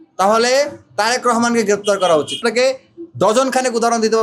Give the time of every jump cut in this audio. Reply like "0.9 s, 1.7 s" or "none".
2.4 s

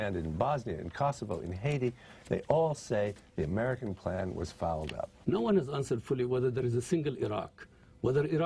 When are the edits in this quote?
5.1 s

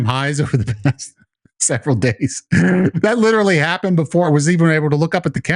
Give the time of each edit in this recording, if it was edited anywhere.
3.0 s, 4.3 s

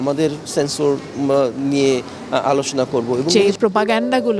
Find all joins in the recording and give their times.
3.3 s

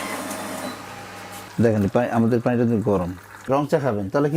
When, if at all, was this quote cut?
1.4 s, 3.5 s

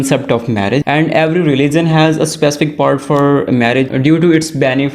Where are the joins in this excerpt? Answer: 0.8 s, 3.9 s

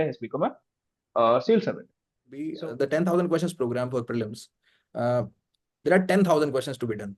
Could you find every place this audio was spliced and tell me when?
2.4 s

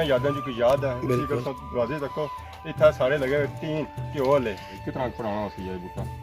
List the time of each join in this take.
4.7 s

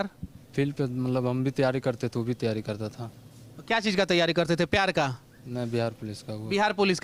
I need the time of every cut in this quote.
none

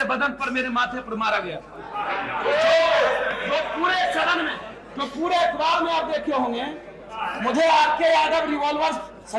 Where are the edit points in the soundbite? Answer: none

